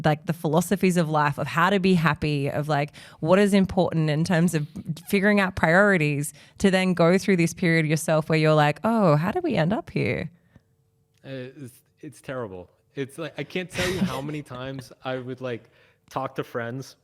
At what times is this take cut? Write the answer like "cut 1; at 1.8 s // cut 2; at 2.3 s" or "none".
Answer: none